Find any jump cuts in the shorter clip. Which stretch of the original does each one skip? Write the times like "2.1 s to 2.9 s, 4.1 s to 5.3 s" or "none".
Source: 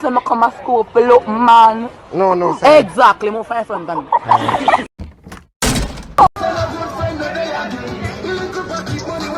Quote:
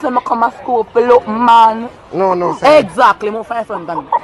none